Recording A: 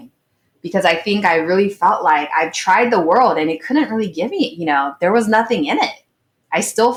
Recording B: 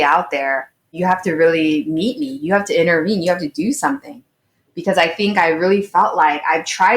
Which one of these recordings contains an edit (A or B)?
B